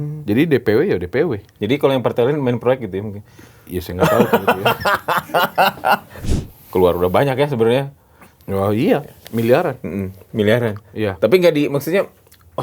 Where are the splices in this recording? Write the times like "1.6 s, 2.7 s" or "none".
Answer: 6.1 s